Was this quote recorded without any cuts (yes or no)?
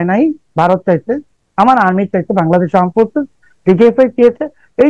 no